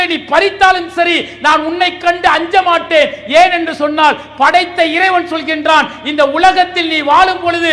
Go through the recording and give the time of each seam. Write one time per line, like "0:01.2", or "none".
none